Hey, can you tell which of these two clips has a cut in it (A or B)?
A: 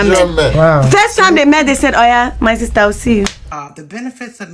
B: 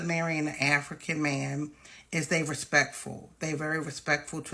A